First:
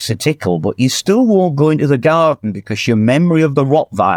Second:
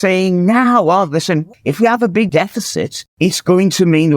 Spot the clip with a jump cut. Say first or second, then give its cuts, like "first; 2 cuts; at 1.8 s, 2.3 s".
second; 2 cuts; at 1.5 s, 3.0 s